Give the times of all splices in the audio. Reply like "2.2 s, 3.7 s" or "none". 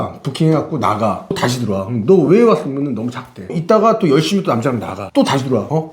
1.3 s, 3.6 s, 5.0 s